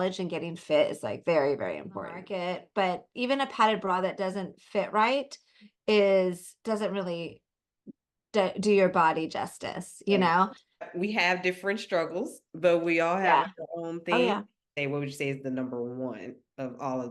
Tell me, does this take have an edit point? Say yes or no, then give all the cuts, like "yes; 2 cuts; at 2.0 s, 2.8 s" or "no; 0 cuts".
yes; 3 cuts; at 2.2 s, 10.8 s, 14.7 s